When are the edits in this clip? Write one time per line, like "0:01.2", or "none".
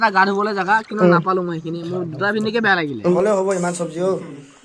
0:03.1